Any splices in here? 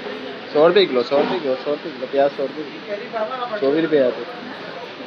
no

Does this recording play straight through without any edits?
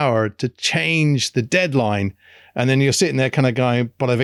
yes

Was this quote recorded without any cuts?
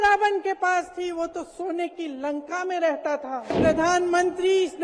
no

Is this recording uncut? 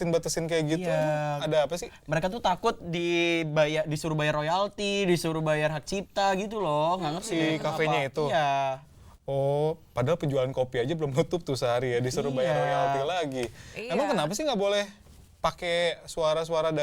yes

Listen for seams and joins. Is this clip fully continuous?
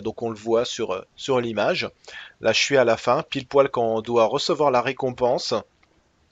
yes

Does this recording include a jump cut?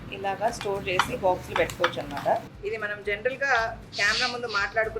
yes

